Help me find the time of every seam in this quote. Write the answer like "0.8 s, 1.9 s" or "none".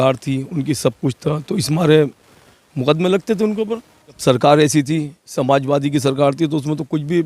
4.2 s